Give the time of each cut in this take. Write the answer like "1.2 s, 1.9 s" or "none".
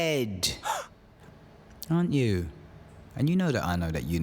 1.0 s

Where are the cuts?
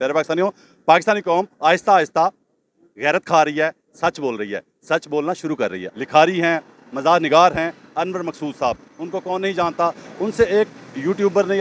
5.8 s

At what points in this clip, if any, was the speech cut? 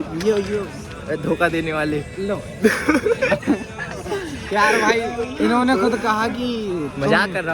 none

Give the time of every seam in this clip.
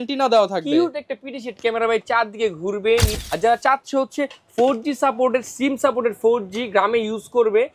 3.2 s

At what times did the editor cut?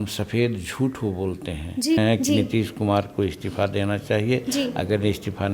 2.0 s

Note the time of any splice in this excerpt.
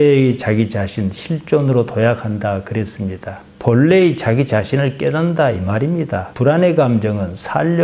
none

